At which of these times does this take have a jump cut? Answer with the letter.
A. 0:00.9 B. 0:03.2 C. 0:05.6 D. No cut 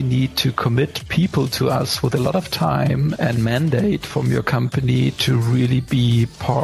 B